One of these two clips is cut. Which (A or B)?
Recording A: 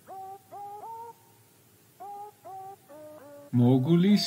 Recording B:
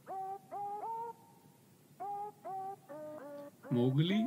A